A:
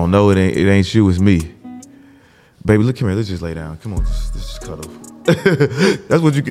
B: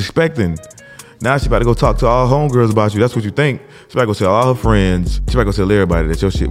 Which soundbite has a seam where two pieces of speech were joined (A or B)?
B